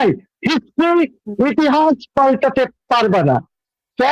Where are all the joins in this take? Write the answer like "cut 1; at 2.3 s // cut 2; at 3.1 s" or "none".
none